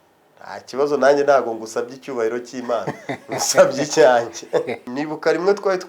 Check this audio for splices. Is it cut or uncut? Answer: cut